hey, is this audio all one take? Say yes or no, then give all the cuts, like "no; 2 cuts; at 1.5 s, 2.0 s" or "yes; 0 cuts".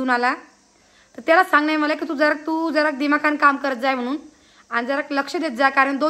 yes; 0 cuts